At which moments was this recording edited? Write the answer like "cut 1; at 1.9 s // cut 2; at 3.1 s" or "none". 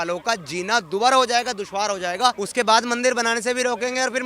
cut 1; at 2.4 s